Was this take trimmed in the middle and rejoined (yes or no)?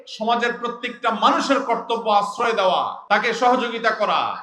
yes